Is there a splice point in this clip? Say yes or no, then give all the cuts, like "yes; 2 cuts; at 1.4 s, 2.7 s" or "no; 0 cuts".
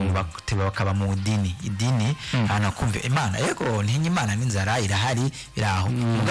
no; 0 cuts